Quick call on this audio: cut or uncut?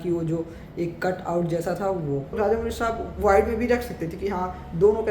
cut